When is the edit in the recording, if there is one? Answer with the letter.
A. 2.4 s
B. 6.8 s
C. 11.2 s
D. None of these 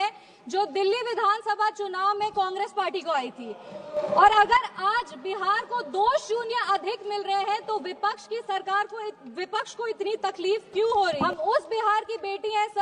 C